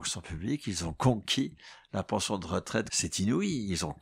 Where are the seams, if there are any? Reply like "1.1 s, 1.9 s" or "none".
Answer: 2.9 s